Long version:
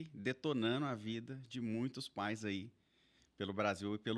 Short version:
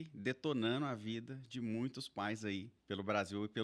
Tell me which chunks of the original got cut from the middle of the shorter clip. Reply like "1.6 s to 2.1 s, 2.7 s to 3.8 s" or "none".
2.7 s to 3.2 s